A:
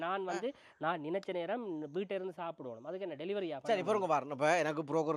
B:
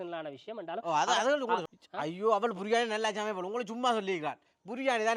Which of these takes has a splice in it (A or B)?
B